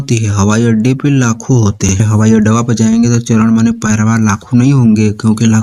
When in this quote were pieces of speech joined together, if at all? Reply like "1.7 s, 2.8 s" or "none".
2.0 s